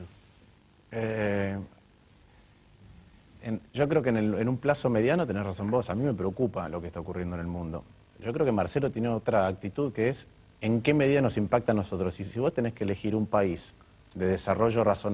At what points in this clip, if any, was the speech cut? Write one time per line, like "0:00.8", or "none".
0:08.0